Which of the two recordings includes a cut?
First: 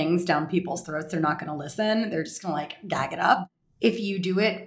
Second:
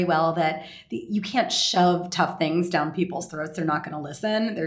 first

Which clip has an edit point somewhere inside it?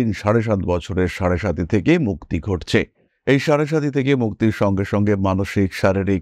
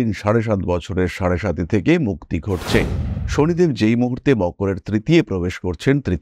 second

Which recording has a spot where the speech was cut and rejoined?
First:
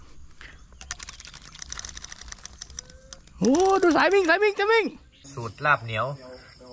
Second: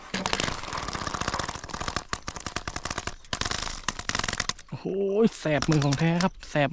first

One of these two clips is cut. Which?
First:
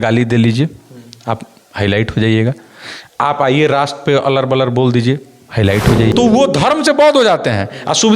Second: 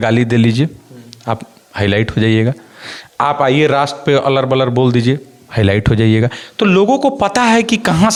first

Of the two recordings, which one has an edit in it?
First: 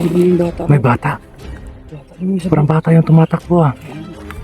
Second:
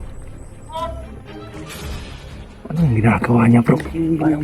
second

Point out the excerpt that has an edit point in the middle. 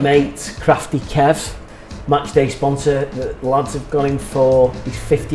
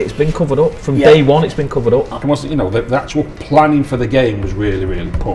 second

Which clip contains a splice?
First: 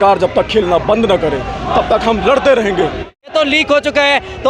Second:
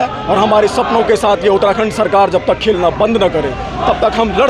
first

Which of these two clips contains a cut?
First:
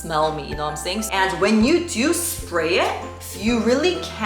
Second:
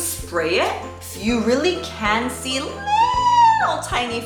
first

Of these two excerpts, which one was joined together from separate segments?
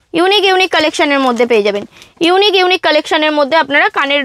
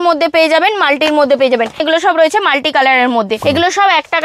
second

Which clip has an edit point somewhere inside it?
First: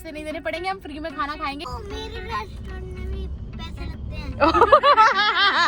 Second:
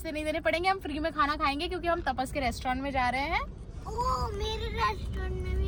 first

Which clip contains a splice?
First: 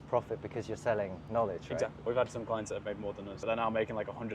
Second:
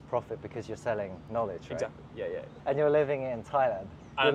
first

